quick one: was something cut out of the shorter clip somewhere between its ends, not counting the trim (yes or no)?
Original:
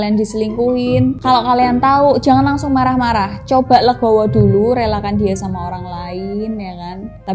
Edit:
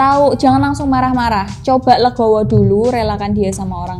no